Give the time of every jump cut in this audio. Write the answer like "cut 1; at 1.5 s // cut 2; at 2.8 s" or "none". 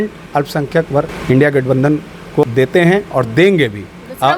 cut 1; at 1.2 s // cut 2; at 2.4 s